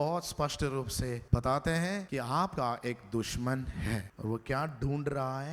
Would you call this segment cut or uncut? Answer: cut